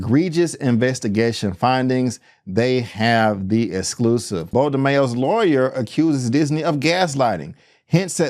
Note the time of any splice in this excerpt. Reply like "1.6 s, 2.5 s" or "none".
4.5 s